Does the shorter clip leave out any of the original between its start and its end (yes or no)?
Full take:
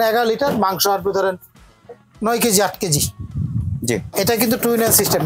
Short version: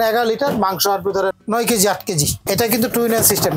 yes